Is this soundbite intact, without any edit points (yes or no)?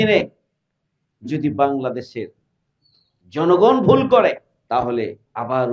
no